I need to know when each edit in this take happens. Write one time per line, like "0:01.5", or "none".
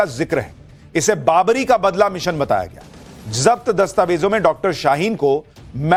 none